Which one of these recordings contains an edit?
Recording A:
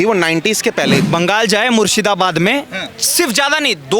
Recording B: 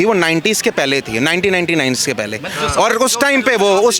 A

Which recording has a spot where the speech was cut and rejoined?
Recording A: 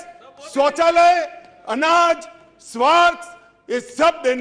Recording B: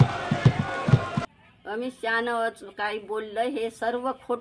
B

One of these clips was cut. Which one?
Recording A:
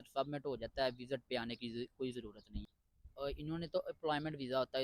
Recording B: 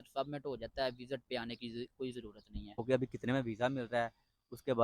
B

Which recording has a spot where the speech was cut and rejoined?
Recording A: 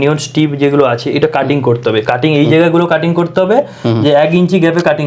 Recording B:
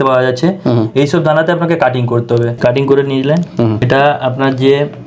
B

